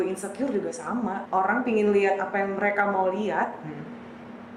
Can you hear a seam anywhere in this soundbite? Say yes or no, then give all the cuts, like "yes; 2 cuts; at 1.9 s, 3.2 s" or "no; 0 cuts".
yes; 1 cut; at 1.2 s